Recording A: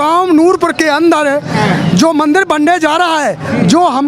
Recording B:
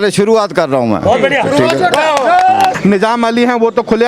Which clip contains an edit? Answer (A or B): B